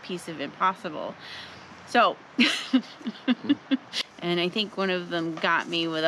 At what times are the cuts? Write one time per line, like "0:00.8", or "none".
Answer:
0:03.9